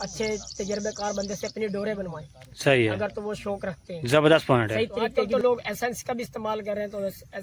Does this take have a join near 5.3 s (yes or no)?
yes